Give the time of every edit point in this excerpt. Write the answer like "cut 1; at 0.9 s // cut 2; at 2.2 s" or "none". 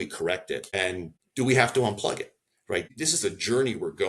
cut 1; at 1.0 s // cut 2; at 2.9 s